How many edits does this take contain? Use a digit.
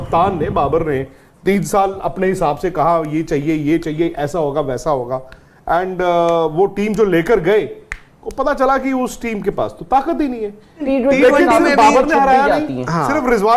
1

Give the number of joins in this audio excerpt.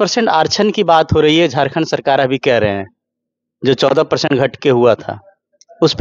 0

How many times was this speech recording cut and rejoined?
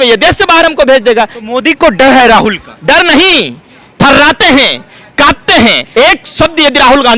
2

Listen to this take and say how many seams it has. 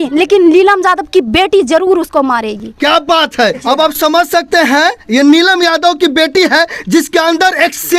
0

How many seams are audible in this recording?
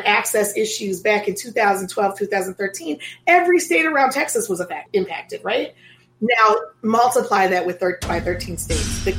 1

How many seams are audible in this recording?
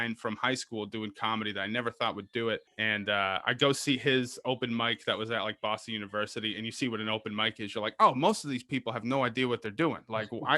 1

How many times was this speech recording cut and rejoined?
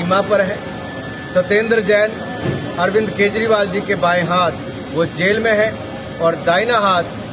0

